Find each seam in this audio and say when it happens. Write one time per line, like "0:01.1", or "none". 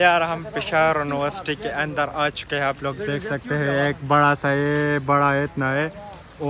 none